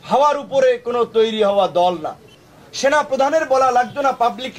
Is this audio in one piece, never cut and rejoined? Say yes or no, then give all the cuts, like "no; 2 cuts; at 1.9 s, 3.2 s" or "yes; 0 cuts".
no; 1 cut; at 2.4 s